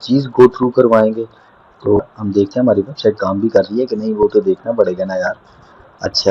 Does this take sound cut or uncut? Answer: cut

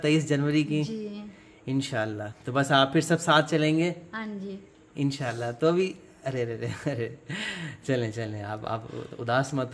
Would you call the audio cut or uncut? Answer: uncut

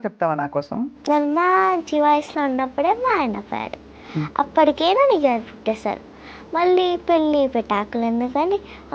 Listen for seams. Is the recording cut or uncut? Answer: cut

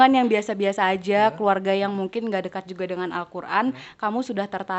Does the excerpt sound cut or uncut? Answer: uncut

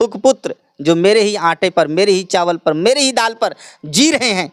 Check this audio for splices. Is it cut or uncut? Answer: uncut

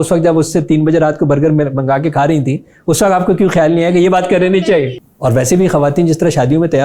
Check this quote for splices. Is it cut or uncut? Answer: cut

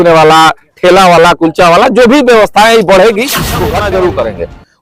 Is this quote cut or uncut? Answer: cut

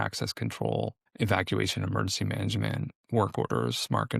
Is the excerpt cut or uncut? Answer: cut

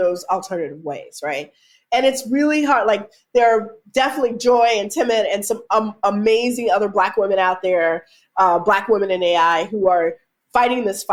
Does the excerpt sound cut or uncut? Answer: uncut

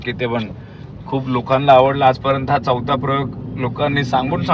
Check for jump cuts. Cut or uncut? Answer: uncut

